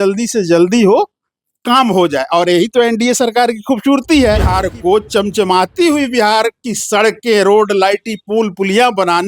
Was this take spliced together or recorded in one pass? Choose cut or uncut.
cut